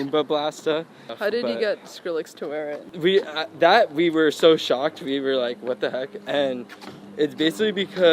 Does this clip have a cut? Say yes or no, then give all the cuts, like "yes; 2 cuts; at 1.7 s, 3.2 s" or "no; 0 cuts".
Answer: yes; 2 cuts; at 1.1 s, 2.9 s